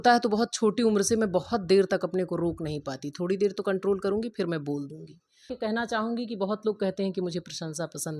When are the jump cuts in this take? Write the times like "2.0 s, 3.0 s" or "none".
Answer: 5.5 s